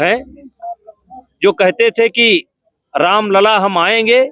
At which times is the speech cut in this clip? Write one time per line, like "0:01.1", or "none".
none